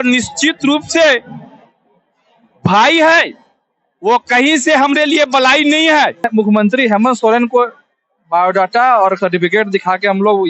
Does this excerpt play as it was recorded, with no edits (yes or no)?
no